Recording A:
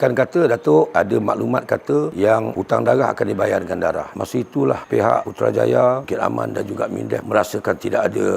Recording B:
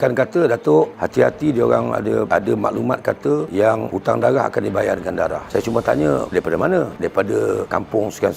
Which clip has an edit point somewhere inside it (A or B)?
A